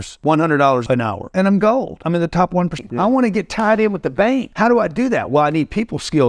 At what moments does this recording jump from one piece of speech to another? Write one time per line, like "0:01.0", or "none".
0:02.8